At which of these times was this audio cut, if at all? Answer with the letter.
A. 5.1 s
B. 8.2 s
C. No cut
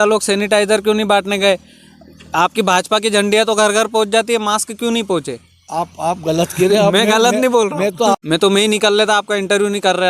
B